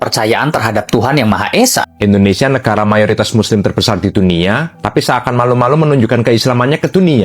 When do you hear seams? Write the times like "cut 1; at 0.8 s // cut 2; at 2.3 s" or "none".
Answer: cut 1; at 1.8 s